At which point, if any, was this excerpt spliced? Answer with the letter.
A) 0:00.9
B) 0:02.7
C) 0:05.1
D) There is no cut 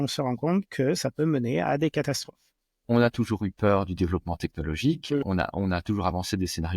B